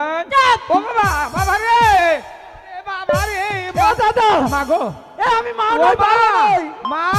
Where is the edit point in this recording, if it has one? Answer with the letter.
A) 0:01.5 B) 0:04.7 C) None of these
C